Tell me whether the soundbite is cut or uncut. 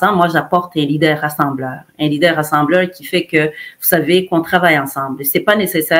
uncut